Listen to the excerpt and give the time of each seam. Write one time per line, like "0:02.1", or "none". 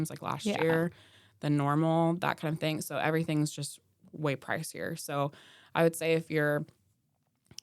none